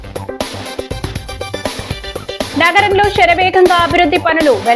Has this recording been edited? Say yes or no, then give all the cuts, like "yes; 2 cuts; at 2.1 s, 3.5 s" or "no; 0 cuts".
yes; 1 cut; at 2.2 s